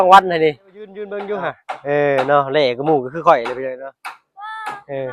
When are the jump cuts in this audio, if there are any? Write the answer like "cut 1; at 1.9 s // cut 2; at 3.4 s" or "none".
cut 1; at 1.1 s